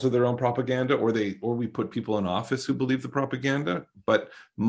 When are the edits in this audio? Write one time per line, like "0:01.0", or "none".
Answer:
none